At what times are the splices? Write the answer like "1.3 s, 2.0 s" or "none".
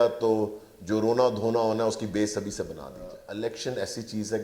3.2 s

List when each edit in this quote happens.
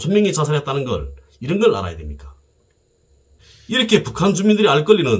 3.4 s

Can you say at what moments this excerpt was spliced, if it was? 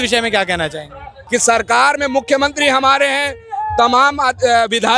1.1 s

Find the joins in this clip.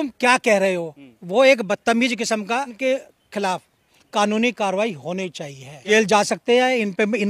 2.7 s, 5.8 s

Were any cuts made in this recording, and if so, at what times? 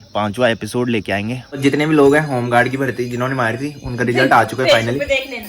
1.6 s

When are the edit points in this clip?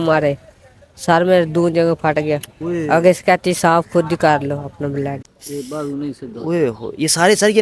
5.3 s

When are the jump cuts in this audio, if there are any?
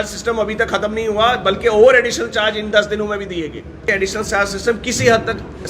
3.9 s

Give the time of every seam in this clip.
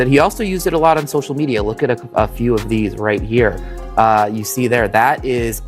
none

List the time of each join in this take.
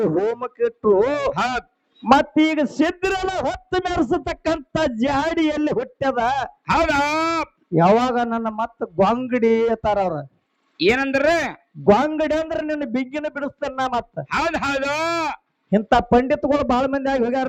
none

